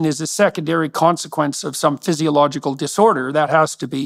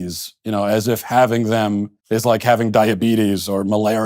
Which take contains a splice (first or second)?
second